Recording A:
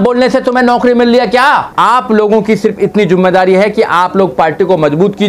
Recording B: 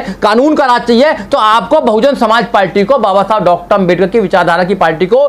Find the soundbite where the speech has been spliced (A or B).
A